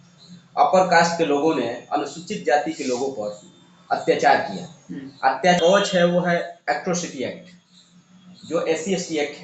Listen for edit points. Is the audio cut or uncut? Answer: cut